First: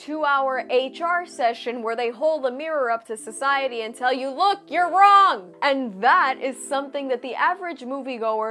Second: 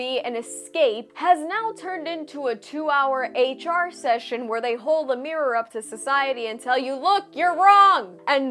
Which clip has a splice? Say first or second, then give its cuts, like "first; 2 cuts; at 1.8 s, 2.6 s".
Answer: second; 1 cut; at 1.1 s